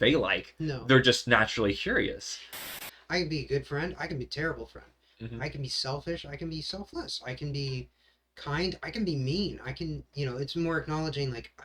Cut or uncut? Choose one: cut